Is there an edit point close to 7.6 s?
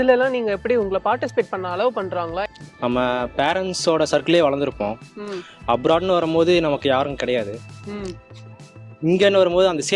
no; 1 cut; at 2.5 s

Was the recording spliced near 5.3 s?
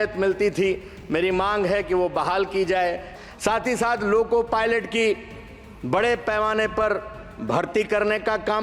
no; 1 cut; at 3.1 s

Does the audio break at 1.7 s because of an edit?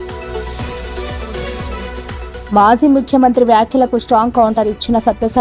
yes; 1 cut; at 1.7 s

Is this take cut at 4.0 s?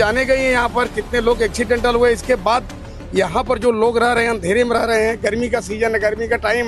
no; 0 cuts

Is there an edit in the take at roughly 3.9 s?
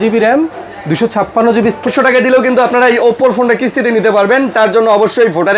no; 1 cut; at 1.9 s

